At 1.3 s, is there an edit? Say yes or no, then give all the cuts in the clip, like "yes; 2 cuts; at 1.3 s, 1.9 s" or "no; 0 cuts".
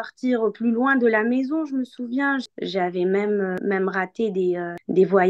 no; 2 cuts; at 2.5 s, 3.6 s